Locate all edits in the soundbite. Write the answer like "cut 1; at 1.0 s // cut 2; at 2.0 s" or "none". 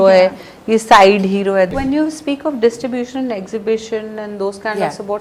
cut 1; at 1.7 s